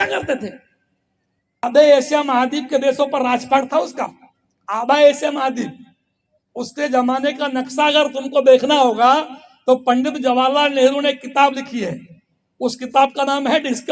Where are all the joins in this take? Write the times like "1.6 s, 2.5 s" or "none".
1.6 s